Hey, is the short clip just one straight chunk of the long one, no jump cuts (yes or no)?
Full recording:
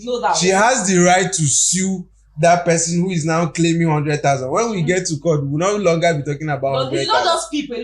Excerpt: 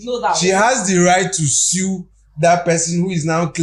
yes